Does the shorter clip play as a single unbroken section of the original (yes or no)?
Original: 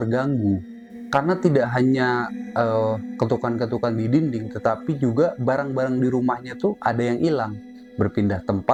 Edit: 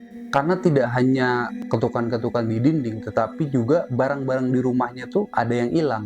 no